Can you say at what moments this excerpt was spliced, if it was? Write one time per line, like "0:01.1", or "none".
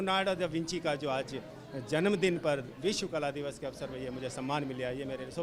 none